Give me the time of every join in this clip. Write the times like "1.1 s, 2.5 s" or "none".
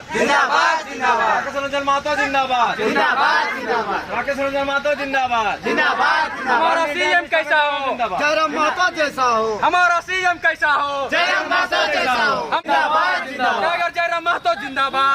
12.6 s